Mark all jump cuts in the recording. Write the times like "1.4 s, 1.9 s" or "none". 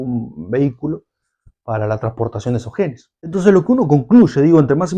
3.3 s